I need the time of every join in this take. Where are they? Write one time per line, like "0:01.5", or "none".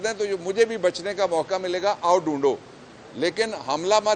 none

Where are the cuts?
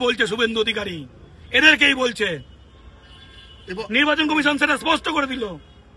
none

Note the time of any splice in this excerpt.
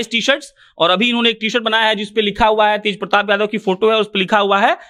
none

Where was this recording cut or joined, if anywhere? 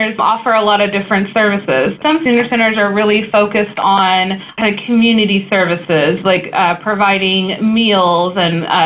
0:04.4

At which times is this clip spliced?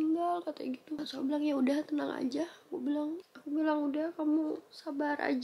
0:01.0
0:03.3

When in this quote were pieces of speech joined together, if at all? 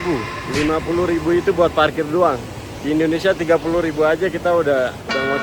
none

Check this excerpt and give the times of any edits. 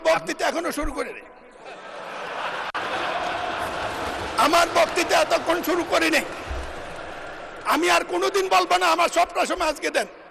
none

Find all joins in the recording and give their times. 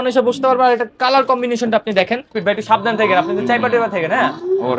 0:02.3

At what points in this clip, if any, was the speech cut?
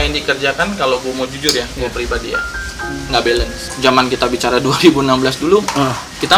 0:03.6

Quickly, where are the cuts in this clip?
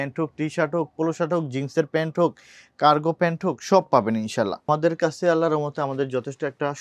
0:04.7

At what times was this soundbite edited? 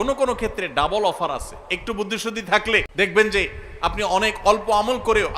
0:02.9

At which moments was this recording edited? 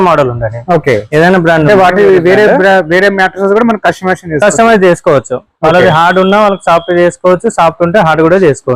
none

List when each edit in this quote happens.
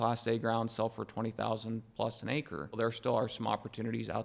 0:02.7

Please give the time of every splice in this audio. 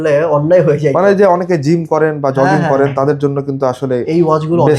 none

